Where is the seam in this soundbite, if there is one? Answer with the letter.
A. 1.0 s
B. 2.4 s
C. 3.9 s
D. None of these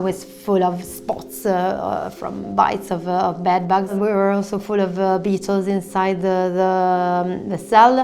C